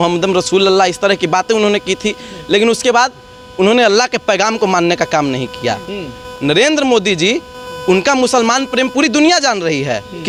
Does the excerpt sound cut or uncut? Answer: uncut